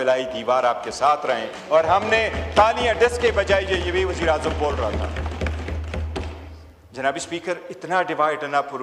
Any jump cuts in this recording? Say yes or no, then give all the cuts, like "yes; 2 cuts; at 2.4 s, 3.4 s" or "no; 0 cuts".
no; 0 cuts